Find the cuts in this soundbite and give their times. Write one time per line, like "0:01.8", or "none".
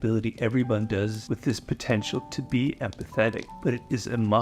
0:01.2
0:03.5